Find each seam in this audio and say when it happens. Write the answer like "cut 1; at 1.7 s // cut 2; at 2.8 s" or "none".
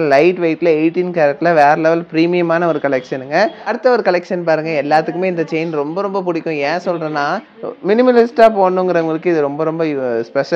cut 1; at 3.7 s // cut 2; at 7.6 s